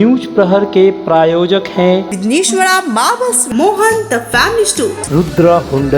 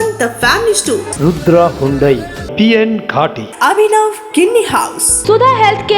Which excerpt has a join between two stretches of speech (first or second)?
second